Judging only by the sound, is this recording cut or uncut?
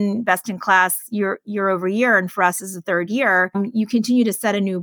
uncut